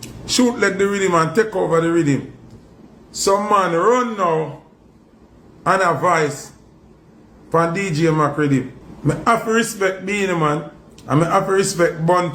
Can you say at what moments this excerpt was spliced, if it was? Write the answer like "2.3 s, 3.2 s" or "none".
none